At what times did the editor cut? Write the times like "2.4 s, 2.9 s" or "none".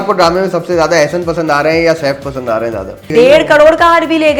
3.1 s